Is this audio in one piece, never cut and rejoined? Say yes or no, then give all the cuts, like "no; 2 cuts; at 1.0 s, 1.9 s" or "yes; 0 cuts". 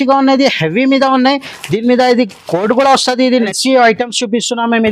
no; 1 cut; at 3.3 s